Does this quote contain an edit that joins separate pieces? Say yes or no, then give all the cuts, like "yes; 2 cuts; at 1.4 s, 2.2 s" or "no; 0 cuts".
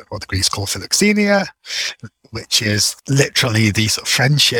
no; 0 cuts